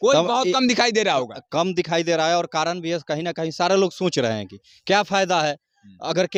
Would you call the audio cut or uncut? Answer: uncut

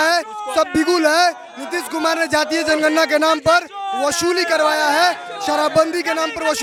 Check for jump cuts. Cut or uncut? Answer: uncut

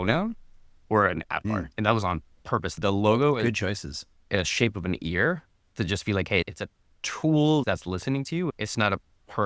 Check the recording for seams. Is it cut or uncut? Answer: cut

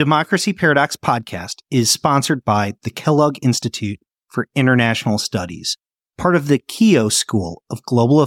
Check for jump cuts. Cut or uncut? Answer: uncut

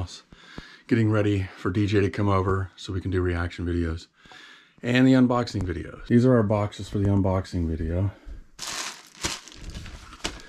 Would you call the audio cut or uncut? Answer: uncut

